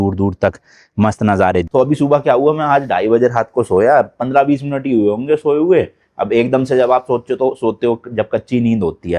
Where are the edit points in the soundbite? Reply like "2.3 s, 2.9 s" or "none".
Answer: 1.7 s